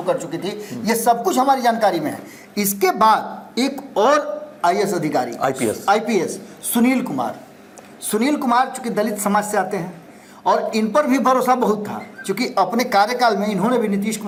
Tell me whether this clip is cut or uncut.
uncut